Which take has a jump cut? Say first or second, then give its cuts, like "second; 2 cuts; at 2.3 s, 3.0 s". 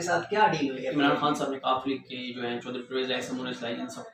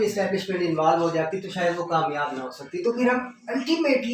first; 1 cut; at 0.9 s